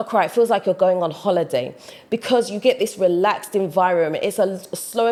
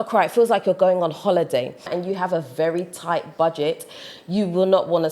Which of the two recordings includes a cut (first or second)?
second